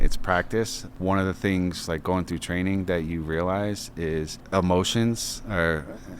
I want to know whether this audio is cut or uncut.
cut